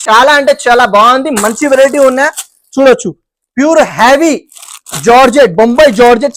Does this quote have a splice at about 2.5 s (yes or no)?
no